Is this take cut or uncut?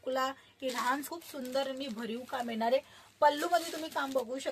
cut